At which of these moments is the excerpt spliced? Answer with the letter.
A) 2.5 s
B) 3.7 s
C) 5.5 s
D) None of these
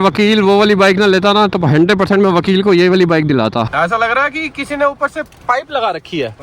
B